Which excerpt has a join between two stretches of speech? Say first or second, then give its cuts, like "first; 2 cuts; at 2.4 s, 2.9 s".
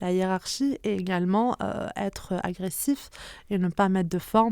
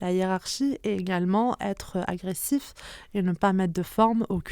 second; 1 cut; at 1.6 s